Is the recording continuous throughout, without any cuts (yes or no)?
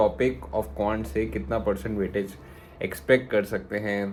yes